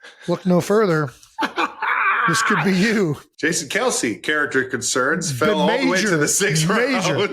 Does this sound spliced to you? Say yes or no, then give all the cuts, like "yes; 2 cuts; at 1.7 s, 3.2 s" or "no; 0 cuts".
yes; 1 cut; at 3.3 s